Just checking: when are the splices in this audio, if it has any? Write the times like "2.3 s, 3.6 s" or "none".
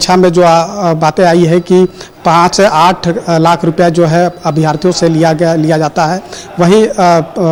none